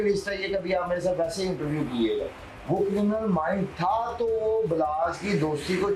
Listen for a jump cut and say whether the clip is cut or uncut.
cut